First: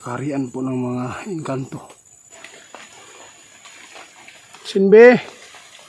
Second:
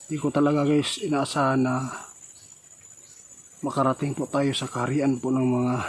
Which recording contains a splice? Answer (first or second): first